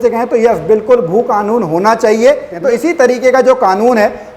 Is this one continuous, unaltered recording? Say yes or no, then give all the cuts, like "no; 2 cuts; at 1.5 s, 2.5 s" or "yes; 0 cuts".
no; 1 cut; at 2.5 s